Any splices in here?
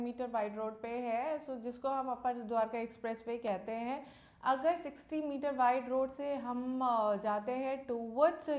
no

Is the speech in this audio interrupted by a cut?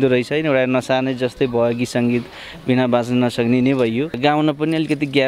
yes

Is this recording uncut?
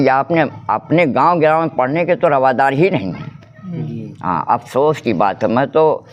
yes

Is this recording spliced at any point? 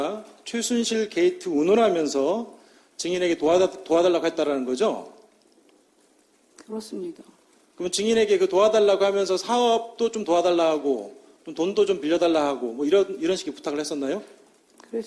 no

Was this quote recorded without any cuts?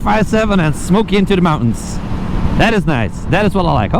yes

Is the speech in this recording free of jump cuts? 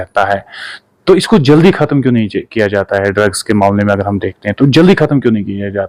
yes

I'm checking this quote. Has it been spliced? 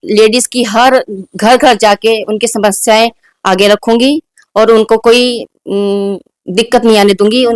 no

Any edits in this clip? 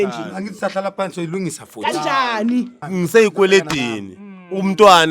yes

